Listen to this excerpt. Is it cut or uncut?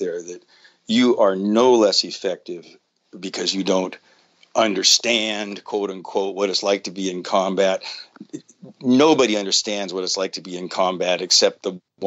uncut